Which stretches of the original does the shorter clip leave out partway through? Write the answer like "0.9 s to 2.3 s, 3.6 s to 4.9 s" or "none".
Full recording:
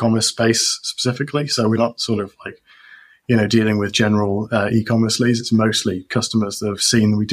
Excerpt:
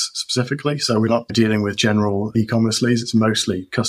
2.0 s to 3.5 s, 4.5 s to 4.7 s